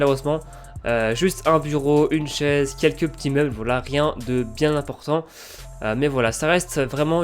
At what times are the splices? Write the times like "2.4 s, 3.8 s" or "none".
3.4 s